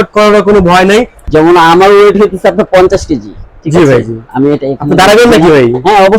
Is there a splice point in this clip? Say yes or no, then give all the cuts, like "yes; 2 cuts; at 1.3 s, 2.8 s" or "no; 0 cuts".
yes; 1 cut; at 1.2 s